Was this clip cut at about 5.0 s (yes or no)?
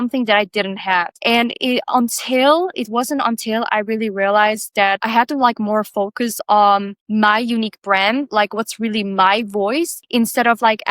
yes